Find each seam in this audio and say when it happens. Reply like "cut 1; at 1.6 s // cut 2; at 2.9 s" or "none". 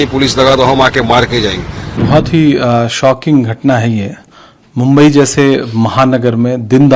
cut 1; at 2.0 s